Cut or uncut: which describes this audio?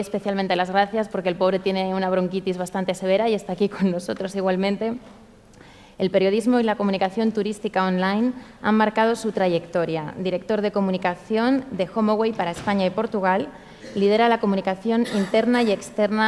uncut